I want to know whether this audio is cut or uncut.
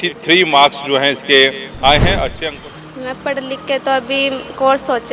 cut